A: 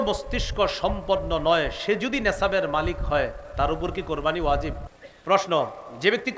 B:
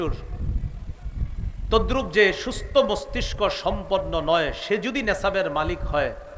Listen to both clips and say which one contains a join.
A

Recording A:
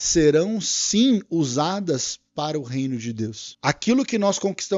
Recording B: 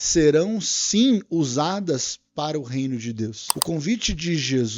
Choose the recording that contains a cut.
B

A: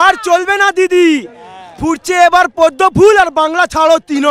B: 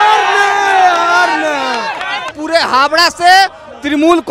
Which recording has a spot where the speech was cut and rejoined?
B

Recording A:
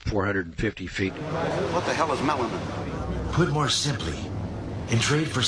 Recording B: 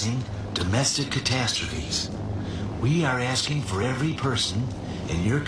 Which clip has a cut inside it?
A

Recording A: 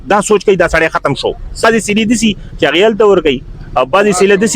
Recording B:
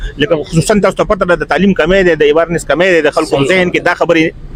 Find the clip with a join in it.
A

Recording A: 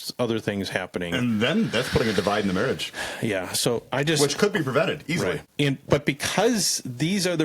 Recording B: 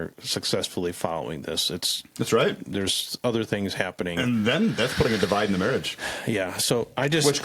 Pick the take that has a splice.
A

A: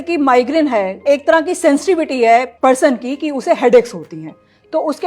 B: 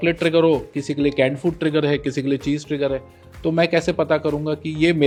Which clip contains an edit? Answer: A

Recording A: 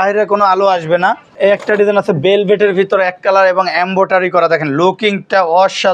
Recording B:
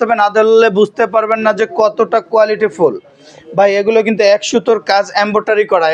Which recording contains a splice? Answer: A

